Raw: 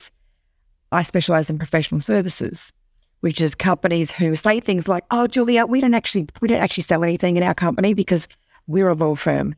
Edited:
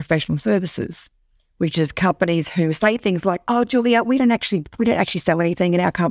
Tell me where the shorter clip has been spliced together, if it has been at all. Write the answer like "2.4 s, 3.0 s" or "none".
none